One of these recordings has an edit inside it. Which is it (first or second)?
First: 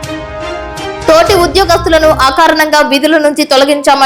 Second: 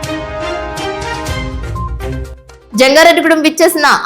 second